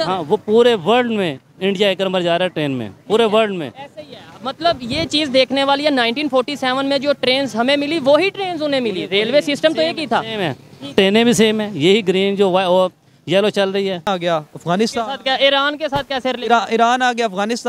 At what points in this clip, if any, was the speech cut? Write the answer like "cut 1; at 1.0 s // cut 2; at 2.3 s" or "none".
cut 1; at 14.1 s